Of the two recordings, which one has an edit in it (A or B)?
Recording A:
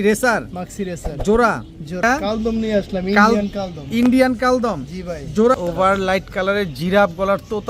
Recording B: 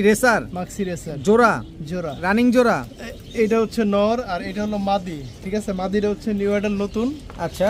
A